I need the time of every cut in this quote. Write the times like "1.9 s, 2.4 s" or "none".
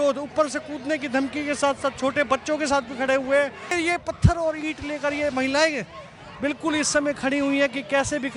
3.7 s